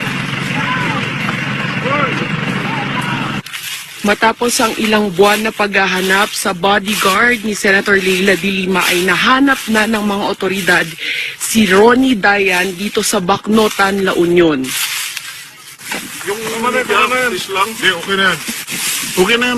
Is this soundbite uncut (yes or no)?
yes